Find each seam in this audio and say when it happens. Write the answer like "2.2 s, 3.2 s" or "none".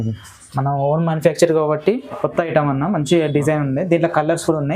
2.0 s